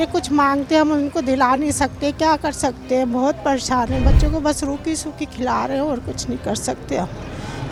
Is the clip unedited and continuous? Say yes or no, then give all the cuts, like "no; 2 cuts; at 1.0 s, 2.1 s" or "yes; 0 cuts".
yes; 0 cuts